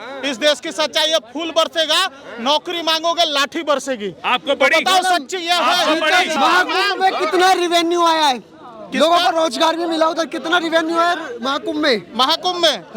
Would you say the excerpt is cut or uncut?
cut